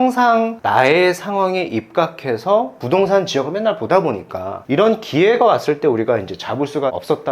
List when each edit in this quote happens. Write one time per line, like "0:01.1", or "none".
0:04.6